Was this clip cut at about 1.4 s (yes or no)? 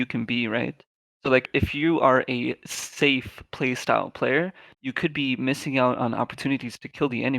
yes